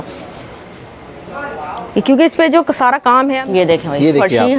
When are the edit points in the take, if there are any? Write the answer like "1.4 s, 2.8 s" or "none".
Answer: 3.4 s